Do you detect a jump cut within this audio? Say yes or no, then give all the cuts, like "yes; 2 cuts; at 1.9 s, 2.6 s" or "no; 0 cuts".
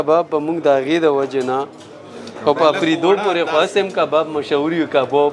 no; 0 cuts